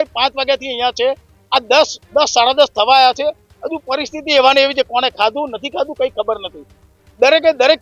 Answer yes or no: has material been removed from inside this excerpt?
no